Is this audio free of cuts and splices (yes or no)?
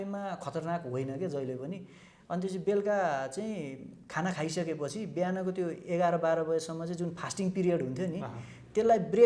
no